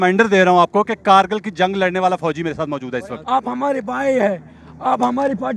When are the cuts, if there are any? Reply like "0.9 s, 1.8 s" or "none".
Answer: 3.1 s